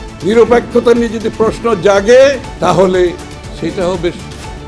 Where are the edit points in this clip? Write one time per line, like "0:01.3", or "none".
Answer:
0:02.5